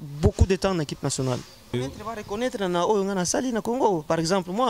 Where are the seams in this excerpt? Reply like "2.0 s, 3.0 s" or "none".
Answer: 1.7 s